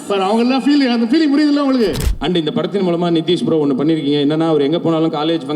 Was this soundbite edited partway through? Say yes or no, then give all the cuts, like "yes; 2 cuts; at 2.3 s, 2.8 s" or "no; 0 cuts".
yes; 1 cut; at 2.1 s